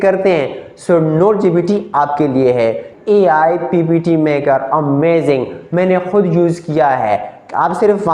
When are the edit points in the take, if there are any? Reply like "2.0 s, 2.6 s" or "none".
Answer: 2.9 s

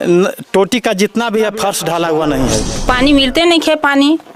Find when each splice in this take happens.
2.7 s

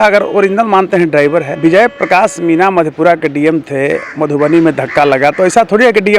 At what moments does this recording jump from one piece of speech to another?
1.5 s

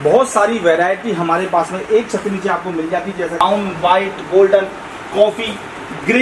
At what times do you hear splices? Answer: 3.4 s

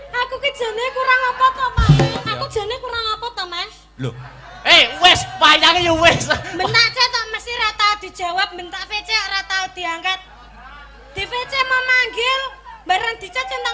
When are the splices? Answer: 2.2 s

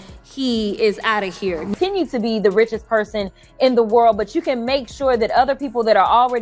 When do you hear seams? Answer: 1.8 s

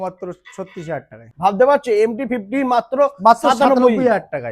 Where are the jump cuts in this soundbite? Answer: 1.2 s

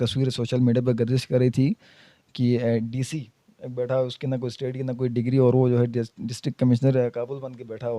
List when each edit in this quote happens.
none

